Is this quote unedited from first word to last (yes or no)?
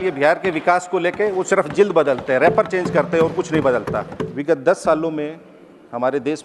no